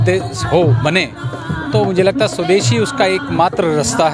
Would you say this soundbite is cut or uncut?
uncut